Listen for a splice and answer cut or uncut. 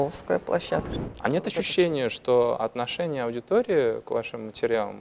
cut